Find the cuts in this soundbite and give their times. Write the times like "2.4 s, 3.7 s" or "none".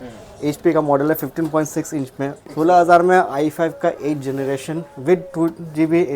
2.4 s